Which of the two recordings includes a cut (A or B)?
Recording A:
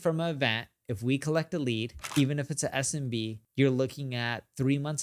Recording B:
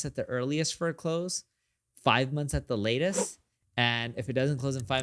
A